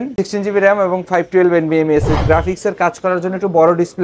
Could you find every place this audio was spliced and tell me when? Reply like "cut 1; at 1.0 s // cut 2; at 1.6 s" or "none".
cut 1; at 2.2 s